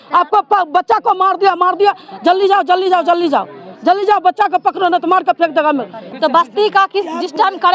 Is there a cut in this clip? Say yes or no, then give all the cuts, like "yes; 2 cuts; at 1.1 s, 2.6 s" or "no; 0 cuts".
no; 0 cuts